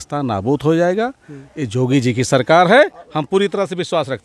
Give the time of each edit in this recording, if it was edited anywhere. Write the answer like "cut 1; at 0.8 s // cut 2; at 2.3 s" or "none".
none